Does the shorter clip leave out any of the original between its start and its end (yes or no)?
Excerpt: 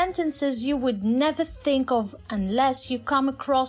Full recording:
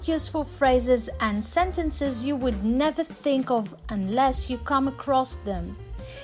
no